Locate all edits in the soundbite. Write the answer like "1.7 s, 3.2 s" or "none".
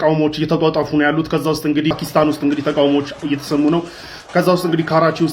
1.9 s